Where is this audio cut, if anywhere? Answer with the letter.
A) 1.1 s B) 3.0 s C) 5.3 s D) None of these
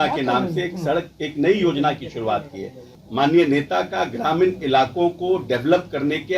B